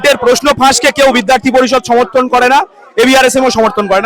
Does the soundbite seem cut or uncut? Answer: uncut